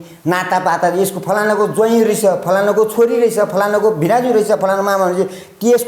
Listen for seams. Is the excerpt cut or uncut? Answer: uncut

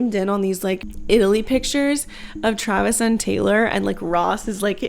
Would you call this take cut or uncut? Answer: cut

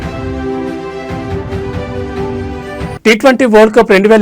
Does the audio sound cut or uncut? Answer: cut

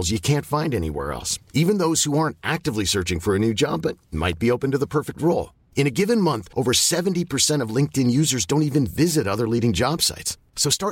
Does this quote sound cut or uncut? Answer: uncut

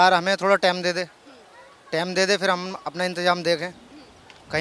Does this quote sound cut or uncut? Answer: uncut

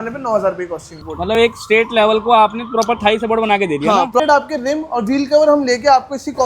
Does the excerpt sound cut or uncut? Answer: cut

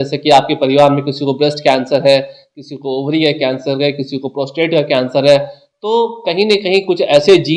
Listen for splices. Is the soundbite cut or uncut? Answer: uncut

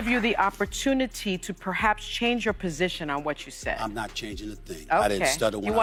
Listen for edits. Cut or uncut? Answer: uncut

